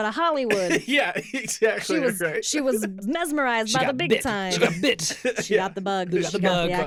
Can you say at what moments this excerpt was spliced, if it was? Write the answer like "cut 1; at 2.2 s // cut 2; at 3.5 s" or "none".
none

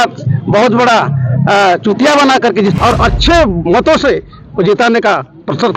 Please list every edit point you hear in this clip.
cut 1; at 2.8 s

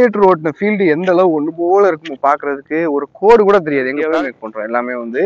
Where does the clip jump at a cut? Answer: cut 1; at 4.0 s

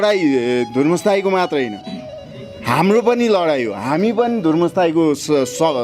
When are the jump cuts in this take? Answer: none

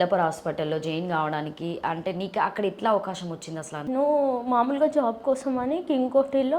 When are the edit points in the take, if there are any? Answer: cut 1; at 3.8 s

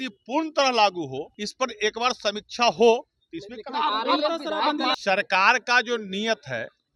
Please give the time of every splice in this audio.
cut 1; at 1.3 s // cut 2; at 5.0 s

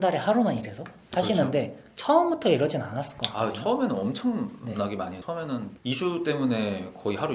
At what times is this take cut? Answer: cut 1; at 5.3 s

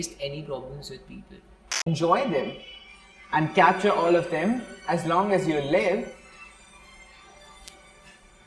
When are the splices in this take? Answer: cut 1; at 1.9 s

